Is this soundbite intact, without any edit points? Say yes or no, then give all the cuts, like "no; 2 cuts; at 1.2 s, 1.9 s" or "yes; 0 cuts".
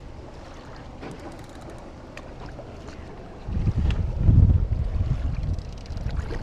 yes; 0 cuts